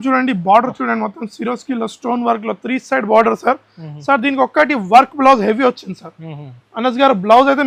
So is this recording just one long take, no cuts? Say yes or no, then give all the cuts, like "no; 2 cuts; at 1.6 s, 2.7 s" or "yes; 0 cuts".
yes; 0 cuts